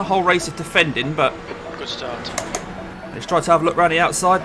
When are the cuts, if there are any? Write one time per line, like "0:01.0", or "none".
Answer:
0:02.5